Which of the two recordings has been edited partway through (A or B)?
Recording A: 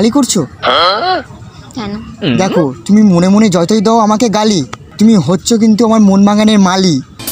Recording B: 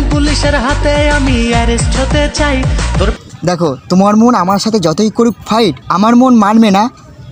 B